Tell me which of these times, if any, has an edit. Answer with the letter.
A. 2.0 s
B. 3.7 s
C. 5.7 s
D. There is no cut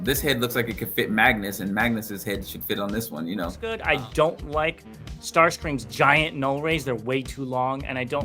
B